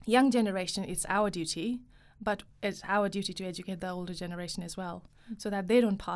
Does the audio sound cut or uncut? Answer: uncut